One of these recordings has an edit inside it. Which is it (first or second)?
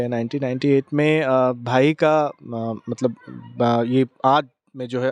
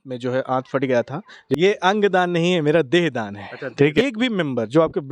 second